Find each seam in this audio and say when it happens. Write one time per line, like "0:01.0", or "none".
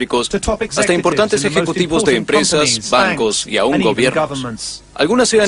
0:03.4